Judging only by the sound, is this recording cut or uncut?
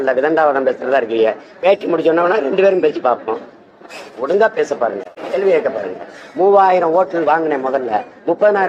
uncut